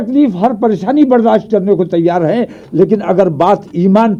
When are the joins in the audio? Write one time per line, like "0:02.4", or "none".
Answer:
none